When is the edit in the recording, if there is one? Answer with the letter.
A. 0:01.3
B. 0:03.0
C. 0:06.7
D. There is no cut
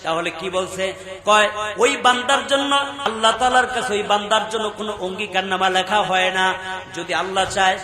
B